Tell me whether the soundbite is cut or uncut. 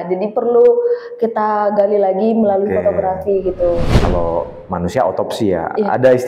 cut